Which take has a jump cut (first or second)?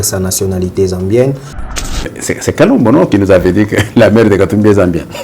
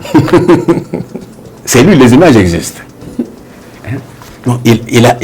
first